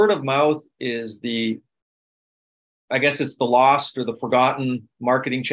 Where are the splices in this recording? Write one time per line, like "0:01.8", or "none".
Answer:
none